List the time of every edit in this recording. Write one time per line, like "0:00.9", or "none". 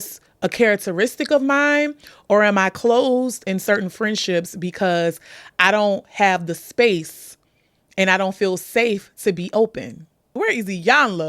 0:10.3